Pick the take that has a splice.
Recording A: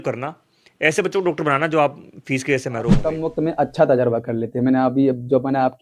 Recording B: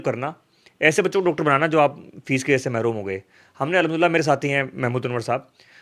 A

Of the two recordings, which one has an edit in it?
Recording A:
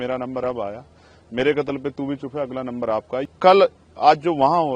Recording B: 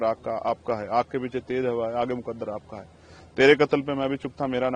A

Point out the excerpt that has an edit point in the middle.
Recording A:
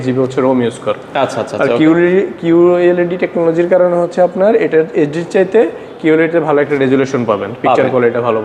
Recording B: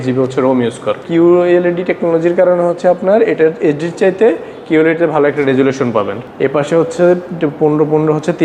B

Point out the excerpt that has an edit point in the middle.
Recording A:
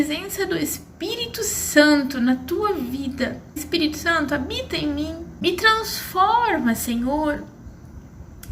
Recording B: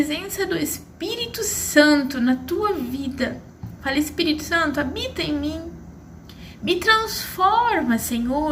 A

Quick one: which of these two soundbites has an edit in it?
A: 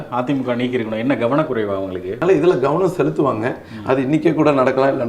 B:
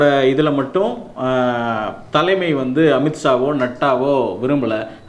A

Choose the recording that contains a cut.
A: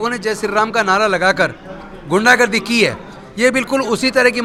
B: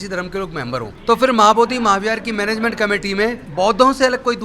B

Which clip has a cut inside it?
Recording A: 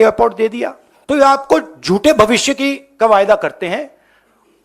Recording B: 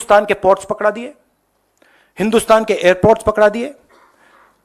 A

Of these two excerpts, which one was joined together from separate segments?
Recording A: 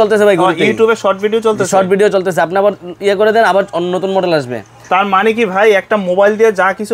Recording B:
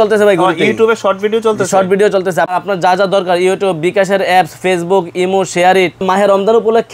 B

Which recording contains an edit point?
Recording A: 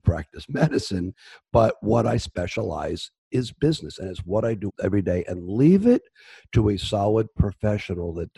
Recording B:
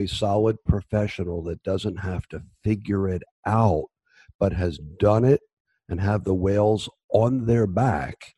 A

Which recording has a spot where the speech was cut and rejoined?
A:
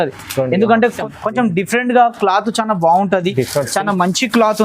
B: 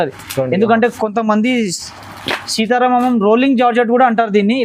A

